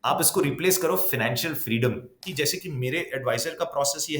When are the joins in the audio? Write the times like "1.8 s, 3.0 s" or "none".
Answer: 2.2 s